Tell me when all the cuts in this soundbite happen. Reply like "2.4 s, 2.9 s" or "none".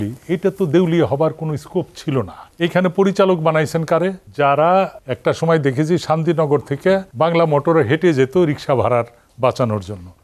2.4 s, 4.2 s, 5.0 s, 7.1 s